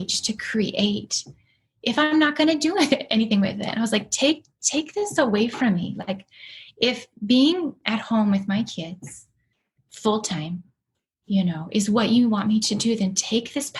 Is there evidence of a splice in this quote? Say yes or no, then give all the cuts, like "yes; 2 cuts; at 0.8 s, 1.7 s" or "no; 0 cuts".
no; 0 cuts